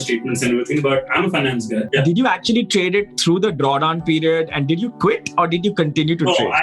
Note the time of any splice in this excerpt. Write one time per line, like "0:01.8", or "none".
0:01.9